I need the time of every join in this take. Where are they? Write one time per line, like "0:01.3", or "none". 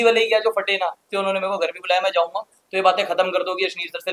0:01.1

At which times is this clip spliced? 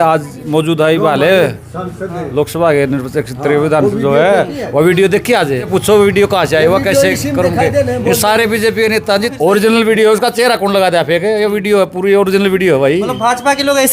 0:05.7
0:09.3

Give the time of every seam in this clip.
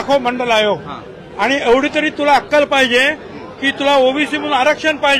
none

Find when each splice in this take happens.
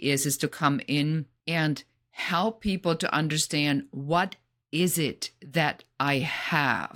0:01.3

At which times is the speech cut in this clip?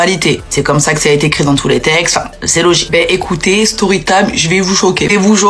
0:03.2

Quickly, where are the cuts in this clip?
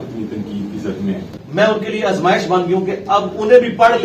0:01.3

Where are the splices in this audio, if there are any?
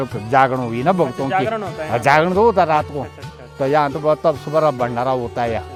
none

